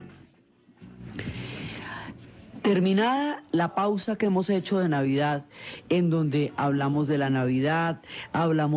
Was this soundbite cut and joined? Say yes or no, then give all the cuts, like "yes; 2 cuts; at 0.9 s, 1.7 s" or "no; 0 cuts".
yes; 1 cut; at 6.0 s